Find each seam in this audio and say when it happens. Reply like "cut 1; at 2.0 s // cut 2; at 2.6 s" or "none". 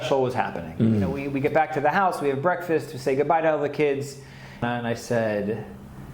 cut 1; at 1.2 s // cut 2; at 4.6 s